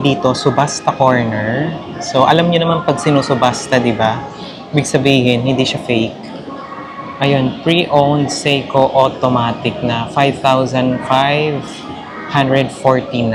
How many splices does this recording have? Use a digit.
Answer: 0